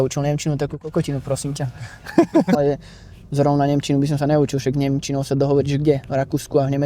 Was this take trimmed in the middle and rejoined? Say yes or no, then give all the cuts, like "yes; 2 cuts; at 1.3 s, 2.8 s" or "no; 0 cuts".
no; 0 cuts